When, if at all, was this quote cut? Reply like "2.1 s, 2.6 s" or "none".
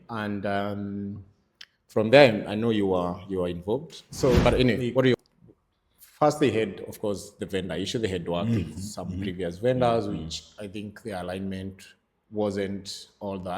5.1 s